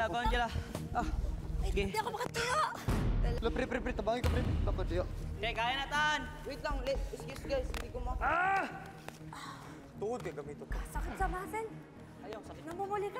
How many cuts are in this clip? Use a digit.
1